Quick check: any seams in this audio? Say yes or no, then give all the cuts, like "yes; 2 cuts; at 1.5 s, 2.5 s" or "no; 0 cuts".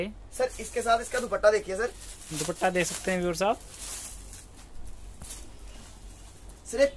no; 0 cuts